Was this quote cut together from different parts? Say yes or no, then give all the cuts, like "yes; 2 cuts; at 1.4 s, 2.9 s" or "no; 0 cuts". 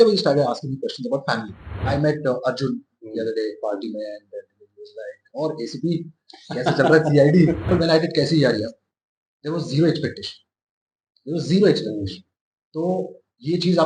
yes; 2 cuts; at 1.8 s, 7.7 s